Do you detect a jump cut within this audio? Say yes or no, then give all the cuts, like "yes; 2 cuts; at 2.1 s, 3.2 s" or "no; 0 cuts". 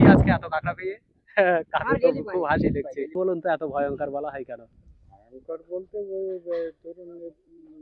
yes; 1 cut; at 3.1 s